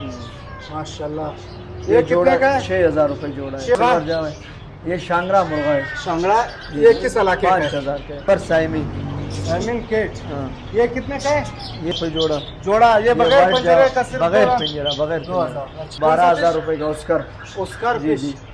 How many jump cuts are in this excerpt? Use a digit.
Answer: 4